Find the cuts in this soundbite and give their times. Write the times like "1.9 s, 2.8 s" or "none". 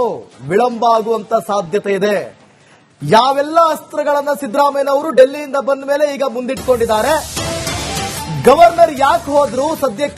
1.7 s